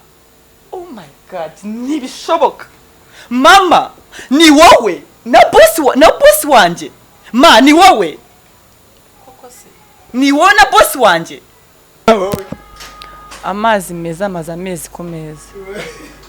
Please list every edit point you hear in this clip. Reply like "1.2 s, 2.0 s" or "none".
12.1 s